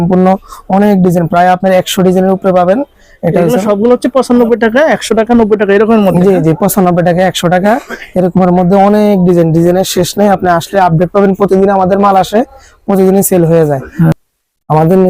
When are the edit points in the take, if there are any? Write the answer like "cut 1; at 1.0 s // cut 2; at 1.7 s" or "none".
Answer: cut 1; at 14.1 s